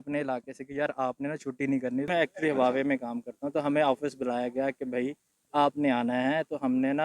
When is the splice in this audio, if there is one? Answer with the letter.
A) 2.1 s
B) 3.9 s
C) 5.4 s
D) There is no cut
A